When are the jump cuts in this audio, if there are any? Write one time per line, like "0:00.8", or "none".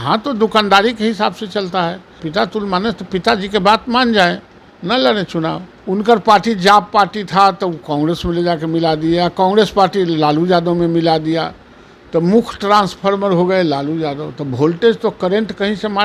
0:02.2
0:05.7